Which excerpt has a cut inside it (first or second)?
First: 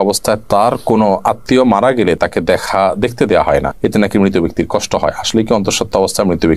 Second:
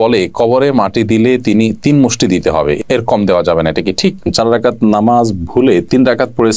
second